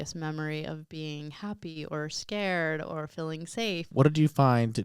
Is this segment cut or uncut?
cut